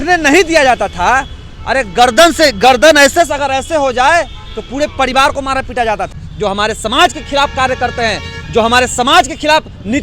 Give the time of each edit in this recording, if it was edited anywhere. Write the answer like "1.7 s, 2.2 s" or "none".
6.2 s